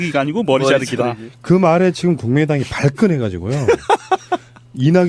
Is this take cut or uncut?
uncut